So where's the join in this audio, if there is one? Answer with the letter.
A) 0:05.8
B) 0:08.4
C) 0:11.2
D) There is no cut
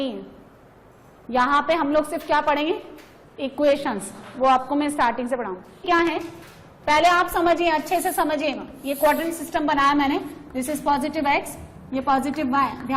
A